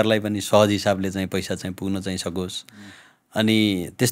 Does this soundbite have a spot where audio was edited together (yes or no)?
no